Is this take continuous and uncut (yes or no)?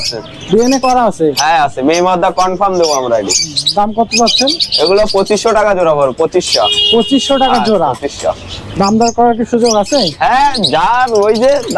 yes